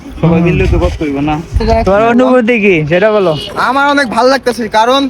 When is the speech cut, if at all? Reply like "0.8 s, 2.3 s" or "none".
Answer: 1.6 s

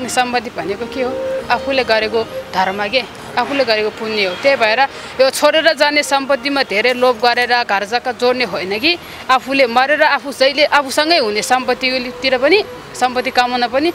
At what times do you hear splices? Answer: none

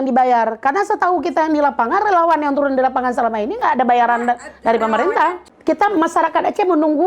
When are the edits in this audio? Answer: 5.5 s

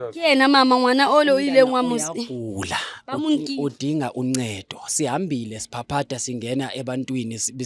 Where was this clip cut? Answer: none

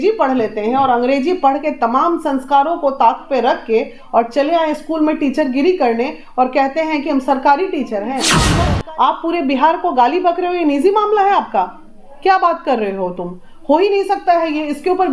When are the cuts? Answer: 8.5 s

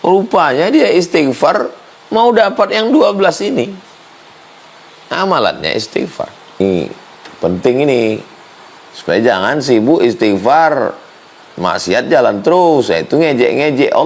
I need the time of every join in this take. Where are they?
6.6 s

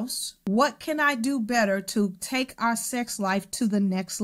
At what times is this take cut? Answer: none

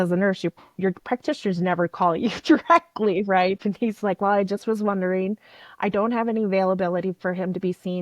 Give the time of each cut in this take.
3.6 s

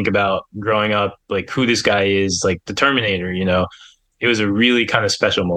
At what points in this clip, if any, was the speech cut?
4.1 s

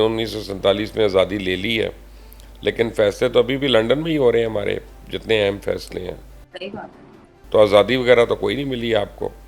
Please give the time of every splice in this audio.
none

